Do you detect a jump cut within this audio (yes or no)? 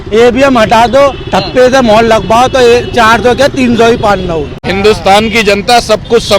yes